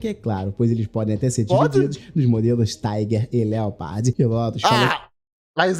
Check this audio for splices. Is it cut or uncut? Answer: uncut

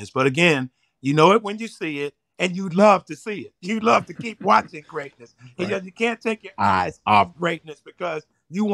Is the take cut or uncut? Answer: uncut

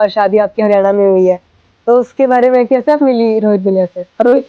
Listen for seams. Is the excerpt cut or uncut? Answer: uncut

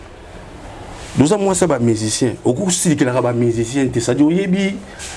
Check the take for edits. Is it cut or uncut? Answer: uncut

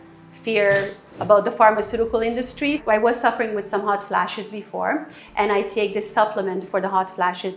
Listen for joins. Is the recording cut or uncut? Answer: cut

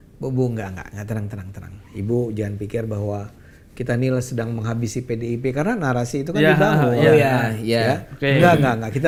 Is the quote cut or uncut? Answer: uncut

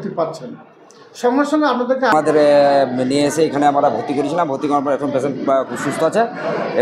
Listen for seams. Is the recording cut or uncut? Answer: cut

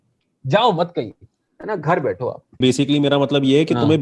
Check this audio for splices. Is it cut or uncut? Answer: cut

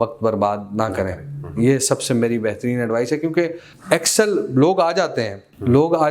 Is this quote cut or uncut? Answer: uncut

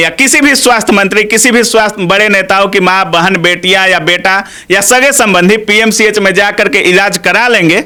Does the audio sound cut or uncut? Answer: uncut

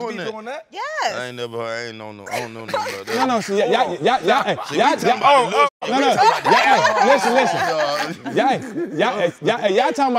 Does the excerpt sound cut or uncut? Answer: uncut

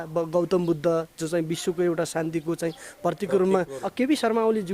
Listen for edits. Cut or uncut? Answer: cut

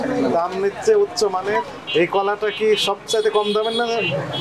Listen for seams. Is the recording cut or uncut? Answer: cut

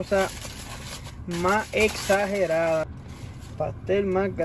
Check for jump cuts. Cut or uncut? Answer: cut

